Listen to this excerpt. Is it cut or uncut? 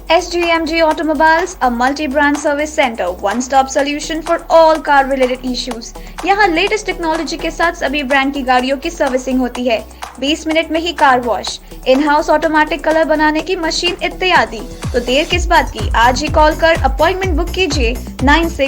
uncut